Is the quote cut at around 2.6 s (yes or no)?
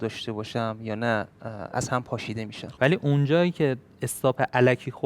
yes